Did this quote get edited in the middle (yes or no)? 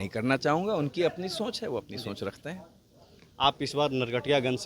no